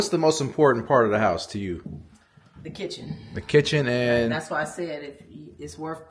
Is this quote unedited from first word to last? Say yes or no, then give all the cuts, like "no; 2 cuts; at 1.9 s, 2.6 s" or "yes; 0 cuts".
yes; 0 cuts